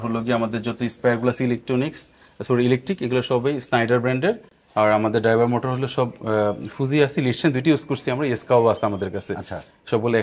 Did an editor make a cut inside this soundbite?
no; 0 cuts

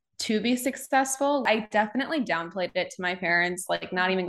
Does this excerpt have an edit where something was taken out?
yes; 1 cut; at 1.4 s

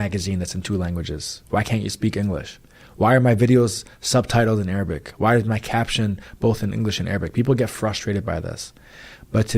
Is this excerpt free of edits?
no; 1 cut; at 8.5 s

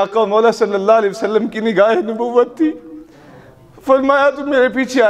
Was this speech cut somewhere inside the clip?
no; 0 cuts

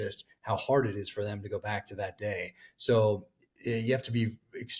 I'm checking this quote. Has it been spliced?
no; 0 cuts

